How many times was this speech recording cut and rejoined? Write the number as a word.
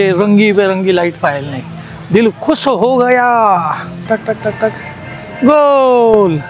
one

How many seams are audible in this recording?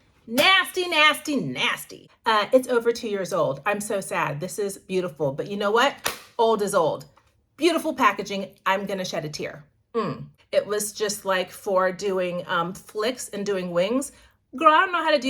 two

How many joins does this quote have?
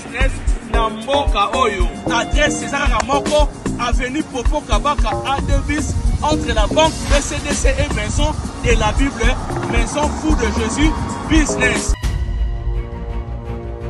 one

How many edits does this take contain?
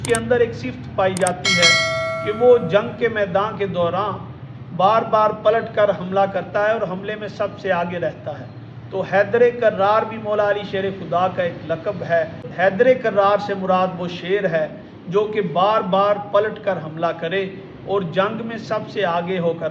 one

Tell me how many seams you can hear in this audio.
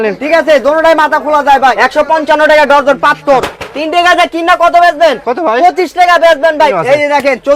three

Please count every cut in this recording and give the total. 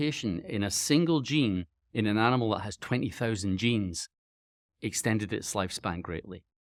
zero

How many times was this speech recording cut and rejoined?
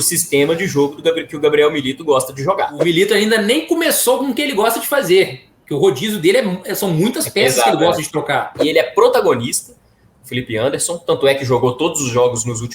two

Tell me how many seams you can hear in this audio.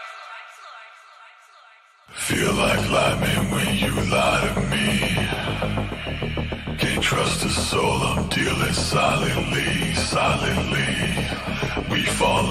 zero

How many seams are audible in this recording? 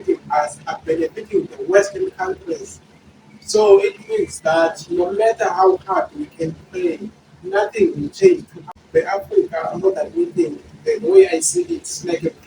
one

